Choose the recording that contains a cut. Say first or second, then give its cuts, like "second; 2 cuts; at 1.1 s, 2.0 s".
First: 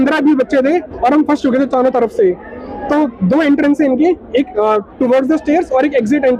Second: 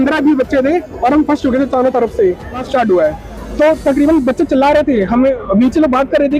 second; 1 cut; at 2.6 s